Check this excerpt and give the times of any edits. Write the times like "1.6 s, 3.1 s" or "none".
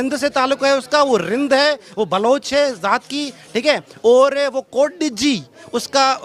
none

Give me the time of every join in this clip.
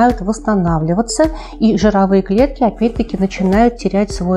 none

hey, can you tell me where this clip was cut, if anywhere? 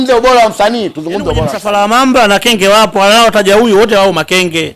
1.6 s

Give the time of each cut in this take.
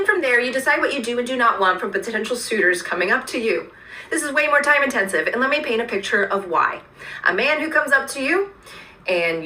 3.8 s

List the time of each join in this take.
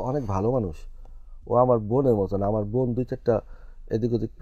none

